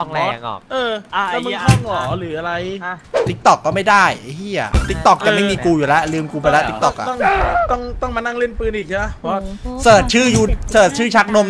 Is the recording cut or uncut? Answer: cut